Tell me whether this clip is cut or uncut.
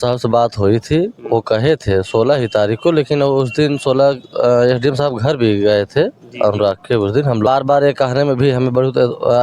cut